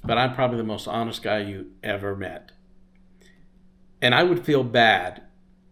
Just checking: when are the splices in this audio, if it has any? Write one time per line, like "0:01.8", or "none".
none